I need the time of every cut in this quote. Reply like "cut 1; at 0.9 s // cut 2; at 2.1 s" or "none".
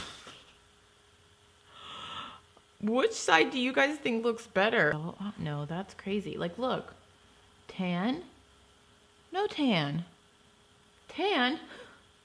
cut 1; at 5.0 s

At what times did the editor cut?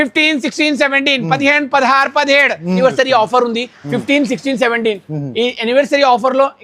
cut 1; at 2.8 s

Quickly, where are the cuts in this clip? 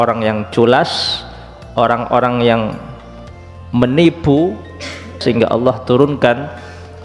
cut 1; at 5.2 s

